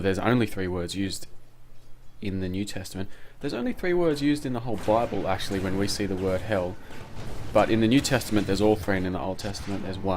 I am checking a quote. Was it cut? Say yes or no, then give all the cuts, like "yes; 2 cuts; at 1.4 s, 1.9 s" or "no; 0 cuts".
yes; 1 cut; at 3.1 s